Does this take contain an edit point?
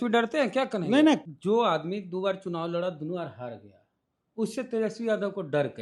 yes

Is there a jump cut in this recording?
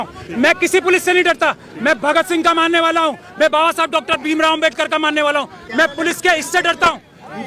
no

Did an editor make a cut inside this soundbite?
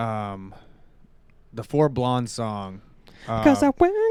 no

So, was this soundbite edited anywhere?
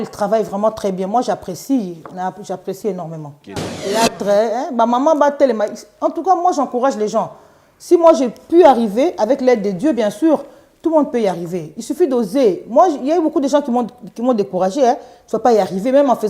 yes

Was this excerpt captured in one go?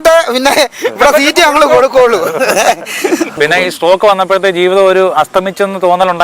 no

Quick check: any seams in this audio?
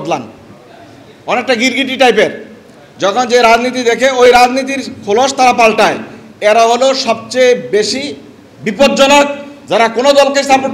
no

